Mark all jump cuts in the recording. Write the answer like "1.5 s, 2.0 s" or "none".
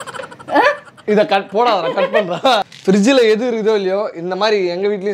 2.7 s